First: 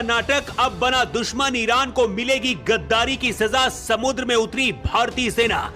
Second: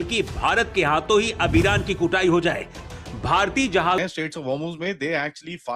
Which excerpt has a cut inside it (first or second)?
second